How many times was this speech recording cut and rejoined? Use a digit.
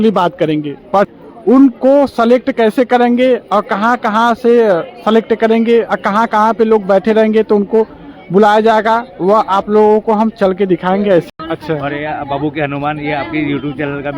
2